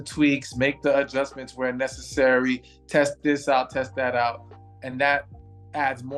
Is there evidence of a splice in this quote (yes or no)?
no